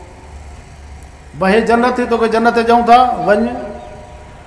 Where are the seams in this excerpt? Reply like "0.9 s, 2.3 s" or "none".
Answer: none